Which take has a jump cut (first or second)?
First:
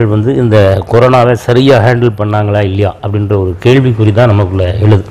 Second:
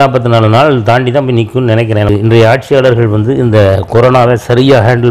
second